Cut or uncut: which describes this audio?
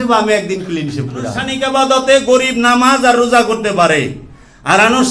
cut